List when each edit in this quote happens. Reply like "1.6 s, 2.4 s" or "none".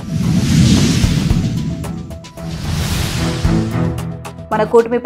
3.9 s